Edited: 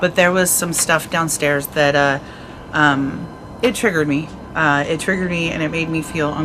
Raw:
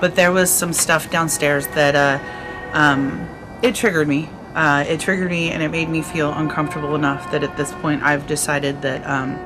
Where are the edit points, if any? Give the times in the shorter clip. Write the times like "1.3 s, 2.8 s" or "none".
none